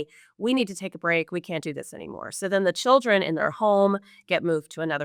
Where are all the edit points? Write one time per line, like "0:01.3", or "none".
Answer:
none